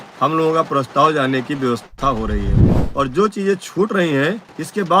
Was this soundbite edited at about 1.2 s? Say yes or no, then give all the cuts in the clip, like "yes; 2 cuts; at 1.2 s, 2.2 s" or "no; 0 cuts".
no; 1 cut; at 2.8 s